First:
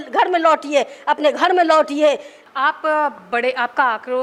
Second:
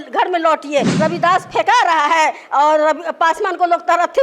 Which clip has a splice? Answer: second; 1 cut; at 1.0 s

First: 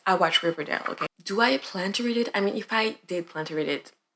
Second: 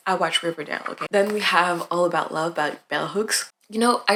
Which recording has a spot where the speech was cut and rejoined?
first; 1 cut; at 1.0 s

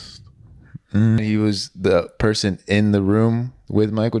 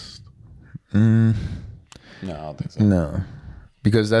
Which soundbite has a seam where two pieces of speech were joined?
first; 1 cut; at 1.2 s

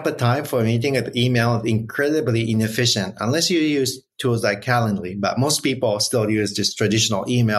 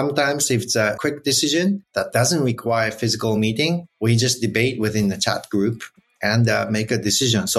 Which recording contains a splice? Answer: second; 3 cuts; at 1.0 s, 1.9 s, 3.9 s

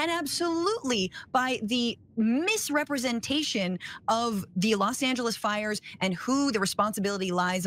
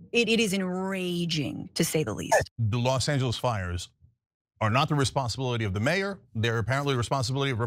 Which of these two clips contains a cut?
second; 1 cut; at 2.6 s

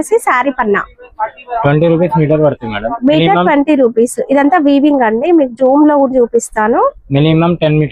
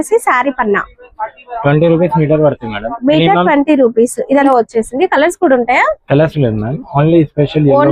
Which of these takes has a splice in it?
second; 1 cut; at 4.5 s

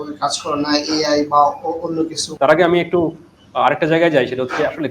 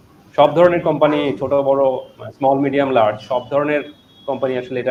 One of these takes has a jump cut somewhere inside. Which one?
first; 1 cut; at 2.2 s

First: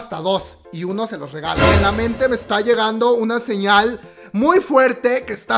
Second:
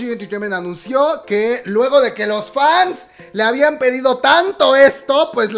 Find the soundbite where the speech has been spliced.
first; 1 cut; at 1.7 s

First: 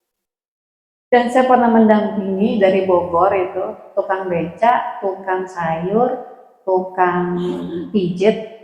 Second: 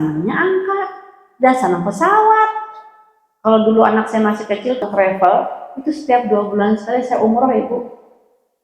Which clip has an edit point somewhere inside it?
second; 1 cut; at 4.8 s

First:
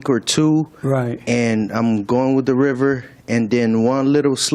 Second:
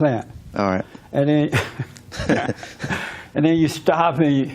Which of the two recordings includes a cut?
second; 1 cut; at 1.0 s

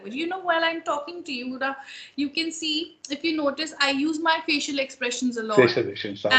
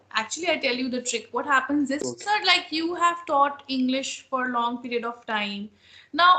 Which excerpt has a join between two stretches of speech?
second; 1 cut; at 2.1 s

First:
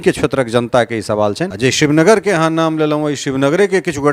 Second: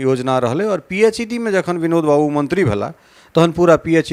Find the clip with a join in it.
first; 1 cut; at 1.5 s

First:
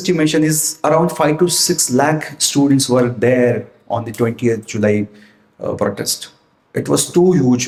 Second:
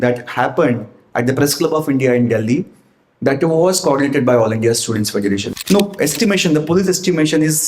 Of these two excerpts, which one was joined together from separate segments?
second; 1 cut; at 5.5 s

